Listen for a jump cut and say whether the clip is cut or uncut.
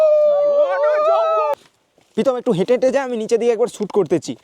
cut